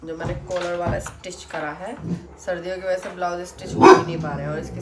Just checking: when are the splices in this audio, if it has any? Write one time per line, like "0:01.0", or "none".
none